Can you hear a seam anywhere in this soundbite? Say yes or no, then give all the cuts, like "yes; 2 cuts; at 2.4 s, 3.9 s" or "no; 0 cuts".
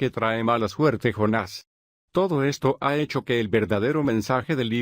yes; 1 cut; at 1.5 s